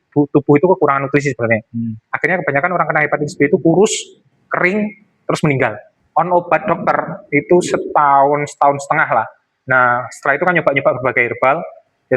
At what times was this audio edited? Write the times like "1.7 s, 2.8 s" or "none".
5.9 s